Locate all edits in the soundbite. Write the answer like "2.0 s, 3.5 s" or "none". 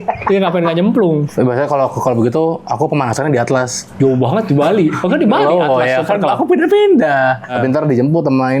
1.3 s, 3.8 s, 7.5 s